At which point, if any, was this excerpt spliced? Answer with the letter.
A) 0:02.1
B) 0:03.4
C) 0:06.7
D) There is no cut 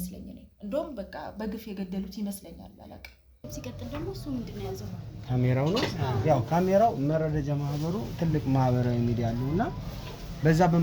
B